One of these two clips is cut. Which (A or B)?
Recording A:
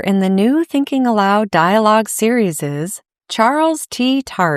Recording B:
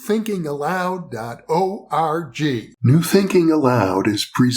B